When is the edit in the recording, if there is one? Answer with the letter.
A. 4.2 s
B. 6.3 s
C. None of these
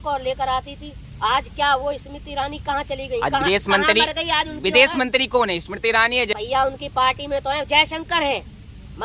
B